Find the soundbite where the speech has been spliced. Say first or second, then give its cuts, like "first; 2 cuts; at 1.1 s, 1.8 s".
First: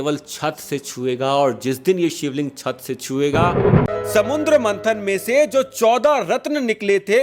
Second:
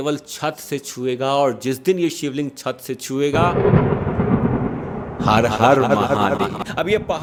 first; 1 cut; at 3.9 s